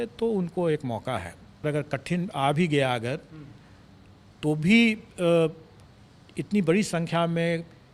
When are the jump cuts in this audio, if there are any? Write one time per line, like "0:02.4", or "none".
0:01.6